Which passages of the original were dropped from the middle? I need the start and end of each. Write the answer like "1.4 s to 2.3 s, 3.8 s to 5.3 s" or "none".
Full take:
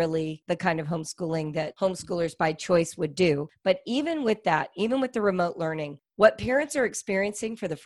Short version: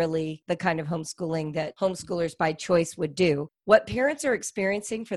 3.5 s to 6.0 s